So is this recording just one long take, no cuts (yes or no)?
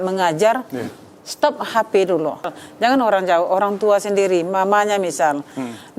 no